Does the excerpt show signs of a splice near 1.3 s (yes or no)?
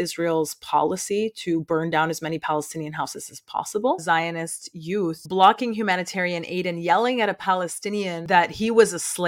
no